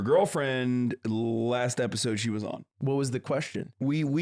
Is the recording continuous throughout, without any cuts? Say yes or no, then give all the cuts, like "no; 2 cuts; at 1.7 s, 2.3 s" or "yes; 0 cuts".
no; 1 cut; at 2.6 s